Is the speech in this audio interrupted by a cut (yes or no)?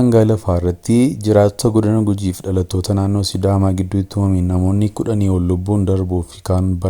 no